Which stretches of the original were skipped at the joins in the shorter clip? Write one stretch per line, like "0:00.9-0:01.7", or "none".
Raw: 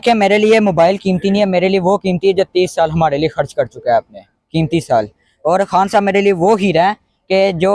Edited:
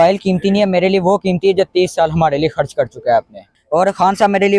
0:04.3-0:05.2